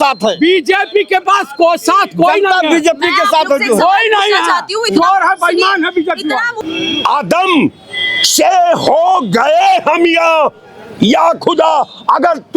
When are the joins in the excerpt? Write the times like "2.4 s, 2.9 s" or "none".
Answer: 6.5 s